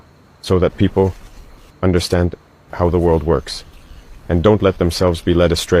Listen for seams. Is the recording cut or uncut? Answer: uncut